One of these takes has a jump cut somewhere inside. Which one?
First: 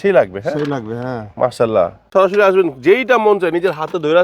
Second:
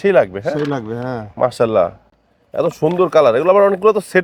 first; 1 cut; at 2.1 s

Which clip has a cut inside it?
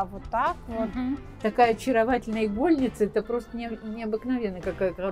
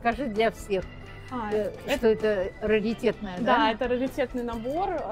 first; 1 cut; at 1.3 s

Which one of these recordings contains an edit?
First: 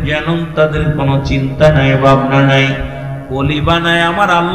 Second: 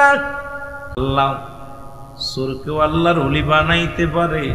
second; 1 cut; at 1.0 s

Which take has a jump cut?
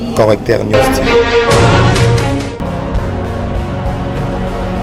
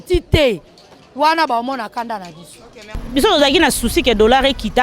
second; 1 cut; at 2.5 s

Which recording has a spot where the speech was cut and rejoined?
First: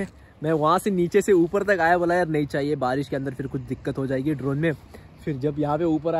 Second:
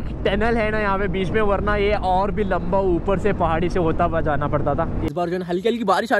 second; 1 cut; at 5.1 s

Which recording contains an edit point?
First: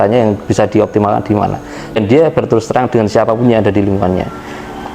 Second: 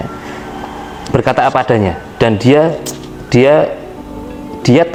first; 1 cut; at 2.0 s

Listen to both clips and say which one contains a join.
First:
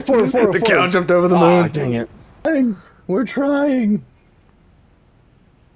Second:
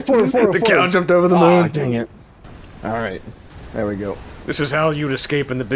first; 1 cut; at 2.5 s

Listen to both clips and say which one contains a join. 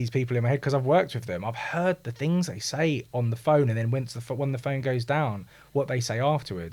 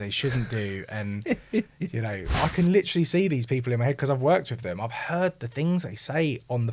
second; 1 cut; at 2.3 s

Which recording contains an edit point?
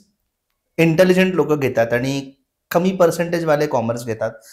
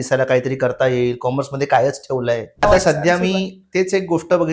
second; 1 cut; at 2.6 s

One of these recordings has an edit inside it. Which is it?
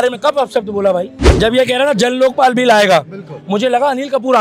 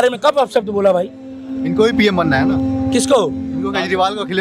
first; 1 cut; at 1.2 s

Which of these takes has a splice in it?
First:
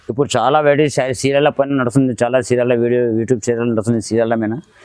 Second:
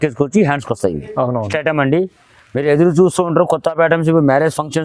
second; 1 cut; at 1.5 s

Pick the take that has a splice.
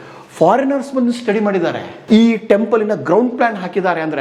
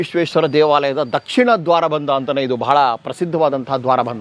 first; 1 cut; at 1.9 s

